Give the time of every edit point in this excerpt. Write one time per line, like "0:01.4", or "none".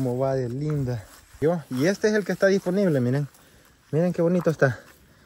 0:01.3